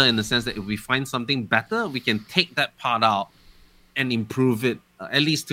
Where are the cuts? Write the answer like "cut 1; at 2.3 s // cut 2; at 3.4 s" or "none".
none